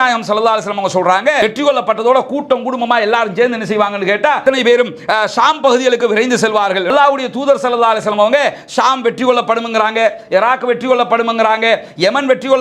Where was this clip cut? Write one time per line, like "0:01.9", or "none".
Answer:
0:01.4
0:04.4
0:06.9